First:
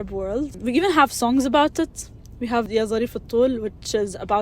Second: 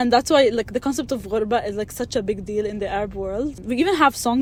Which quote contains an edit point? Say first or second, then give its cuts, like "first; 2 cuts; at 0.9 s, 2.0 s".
first; 1 cut; at 2.7 s